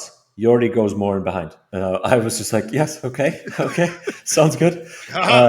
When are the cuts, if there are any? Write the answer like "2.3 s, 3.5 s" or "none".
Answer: 1.6 s